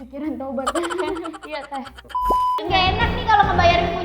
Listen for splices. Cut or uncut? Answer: cut